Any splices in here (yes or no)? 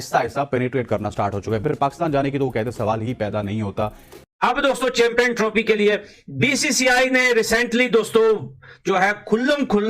yes